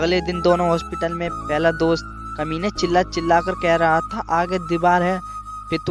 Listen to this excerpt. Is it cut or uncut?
uncut